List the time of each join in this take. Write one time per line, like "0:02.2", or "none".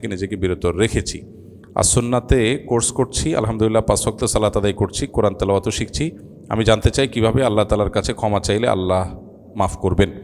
none